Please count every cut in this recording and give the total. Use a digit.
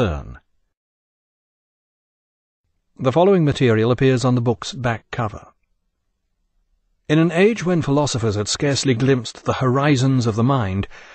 0